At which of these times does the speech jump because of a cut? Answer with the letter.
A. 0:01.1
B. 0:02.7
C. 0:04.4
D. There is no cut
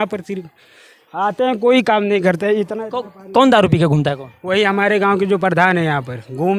D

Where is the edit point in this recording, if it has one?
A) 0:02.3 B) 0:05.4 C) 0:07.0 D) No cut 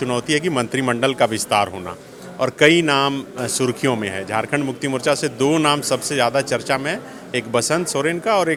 D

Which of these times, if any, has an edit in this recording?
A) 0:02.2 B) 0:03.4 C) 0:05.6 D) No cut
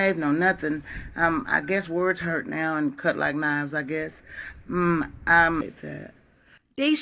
C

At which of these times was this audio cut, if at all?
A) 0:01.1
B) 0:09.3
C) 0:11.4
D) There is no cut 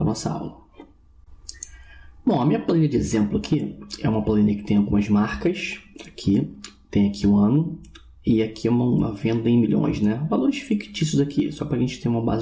C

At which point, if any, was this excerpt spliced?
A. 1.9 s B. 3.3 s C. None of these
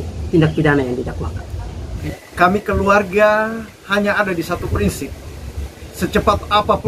A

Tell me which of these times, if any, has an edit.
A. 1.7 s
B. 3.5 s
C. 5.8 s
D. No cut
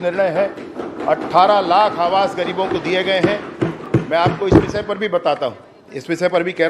D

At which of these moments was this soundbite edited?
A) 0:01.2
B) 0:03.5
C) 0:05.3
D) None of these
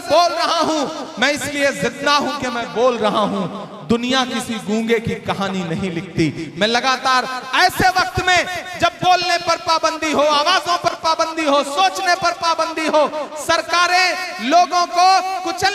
D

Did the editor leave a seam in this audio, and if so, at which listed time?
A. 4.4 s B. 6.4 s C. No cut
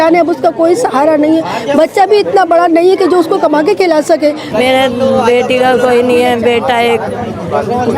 A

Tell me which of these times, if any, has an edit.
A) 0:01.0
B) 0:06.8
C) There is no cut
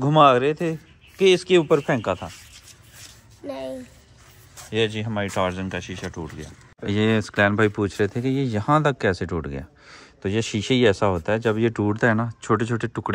B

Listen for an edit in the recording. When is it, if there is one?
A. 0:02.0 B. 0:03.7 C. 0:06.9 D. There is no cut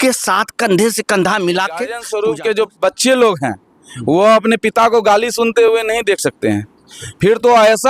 A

